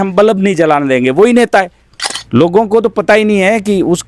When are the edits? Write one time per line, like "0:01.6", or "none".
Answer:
0:02.2